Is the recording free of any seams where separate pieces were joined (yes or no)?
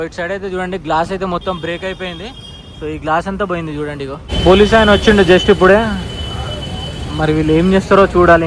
no